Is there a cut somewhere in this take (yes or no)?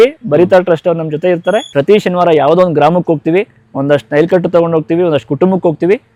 no